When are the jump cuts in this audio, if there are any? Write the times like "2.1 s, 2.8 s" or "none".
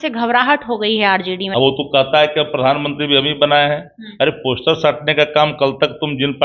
1.4 s